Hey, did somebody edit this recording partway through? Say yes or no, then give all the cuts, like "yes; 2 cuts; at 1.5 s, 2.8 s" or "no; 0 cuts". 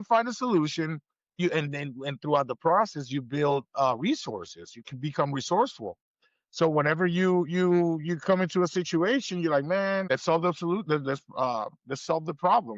yes; 2 cuts; at 1.4 s, 10.1 s